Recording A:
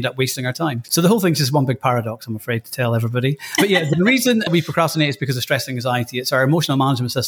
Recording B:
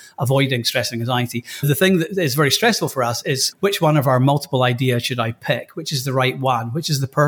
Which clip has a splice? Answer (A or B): A